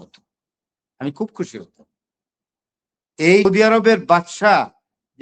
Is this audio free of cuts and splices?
no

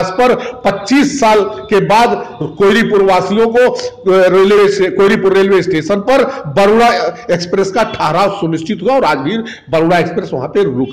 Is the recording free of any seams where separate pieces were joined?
yes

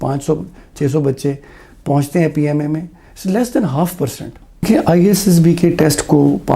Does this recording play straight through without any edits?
no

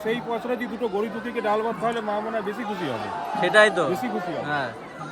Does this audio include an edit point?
no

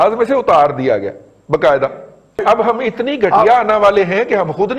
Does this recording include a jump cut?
yes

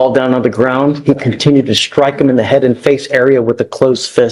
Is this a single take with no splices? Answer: yes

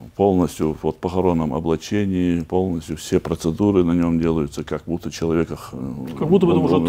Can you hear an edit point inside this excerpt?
no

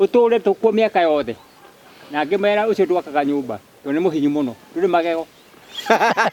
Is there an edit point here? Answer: no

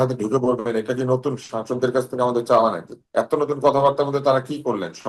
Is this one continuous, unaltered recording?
no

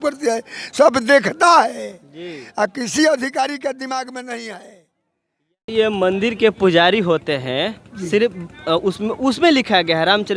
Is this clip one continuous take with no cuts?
no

